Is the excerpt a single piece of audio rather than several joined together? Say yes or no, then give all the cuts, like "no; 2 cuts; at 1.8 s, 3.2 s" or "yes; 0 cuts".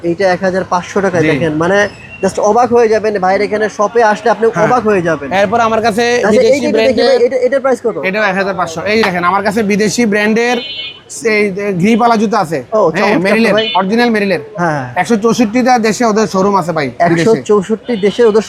yes; 0 cuts